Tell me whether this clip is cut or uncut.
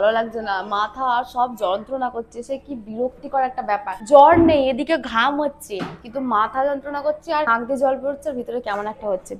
uncut